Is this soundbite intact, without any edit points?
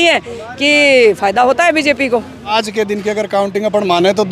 no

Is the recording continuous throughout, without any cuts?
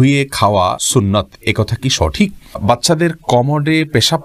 no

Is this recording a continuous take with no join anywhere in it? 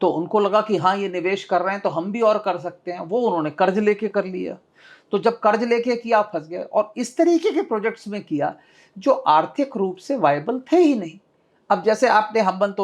yes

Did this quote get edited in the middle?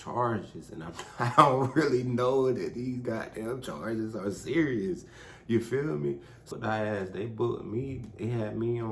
yes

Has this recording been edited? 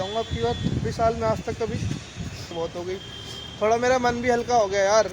yes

